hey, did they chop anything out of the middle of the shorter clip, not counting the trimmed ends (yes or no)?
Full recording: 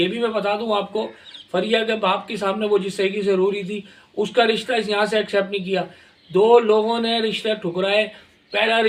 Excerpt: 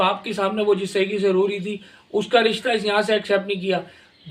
no